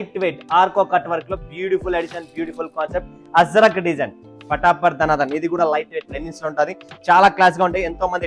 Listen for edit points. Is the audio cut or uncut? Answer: uncut